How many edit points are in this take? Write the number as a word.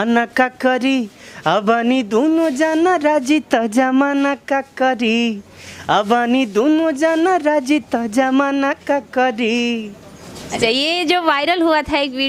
zero